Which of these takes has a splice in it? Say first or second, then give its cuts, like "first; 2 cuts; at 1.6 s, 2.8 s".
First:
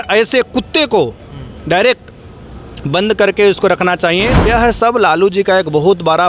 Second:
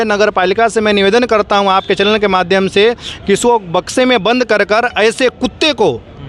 first; 1 cut; at 4.4 s